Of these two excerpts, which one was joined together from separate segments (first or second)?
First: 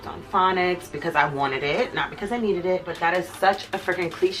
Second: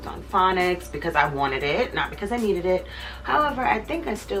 first